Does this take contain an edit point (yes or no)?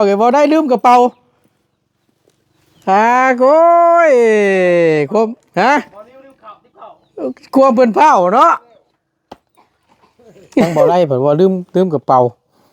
yes